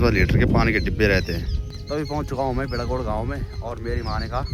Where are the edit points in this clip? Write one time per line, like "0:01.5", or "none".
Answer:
none